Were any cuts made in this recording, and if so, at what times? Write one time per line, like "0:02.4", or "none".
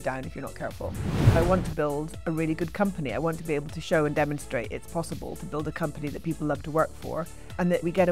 0:01.4